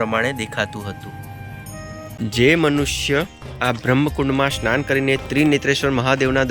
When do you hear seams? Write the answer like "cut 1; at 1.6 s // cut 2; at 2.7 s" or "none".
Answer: cut 1; at 2.1 s